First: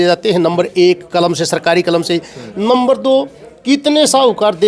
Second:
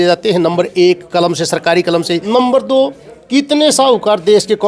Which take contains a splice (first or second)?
second